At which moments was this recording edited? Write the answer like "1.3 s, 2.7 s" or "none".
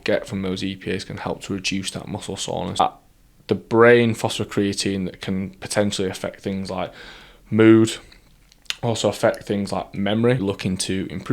2.8 s, 10.4 s